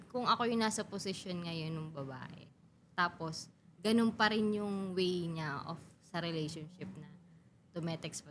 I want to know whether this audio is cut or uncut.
uncut